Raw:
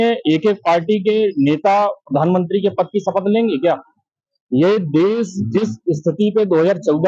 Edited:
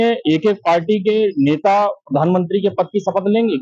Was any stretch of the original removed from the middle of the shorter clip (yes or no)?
no